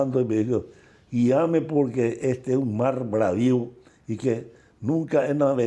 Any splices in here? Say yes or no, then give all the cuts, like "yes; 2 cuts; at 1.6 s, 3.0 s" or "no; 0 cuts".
no; 0 cuts